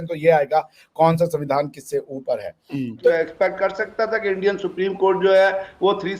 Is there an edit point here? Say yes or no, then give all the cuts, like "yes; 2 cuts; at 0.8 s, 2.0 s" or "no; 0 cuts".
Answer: yes; 1 cut; at 3.1 s